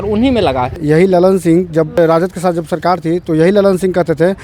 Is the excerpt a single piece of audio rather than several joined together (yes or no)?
no